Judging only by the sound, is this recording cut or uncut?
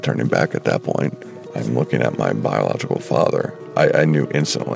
cut